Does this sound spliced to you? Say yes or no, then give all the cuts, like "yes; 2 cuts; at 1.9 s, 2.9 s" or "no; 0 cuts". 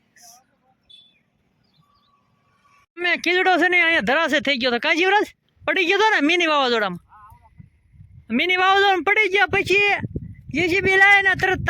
no; 0 cuts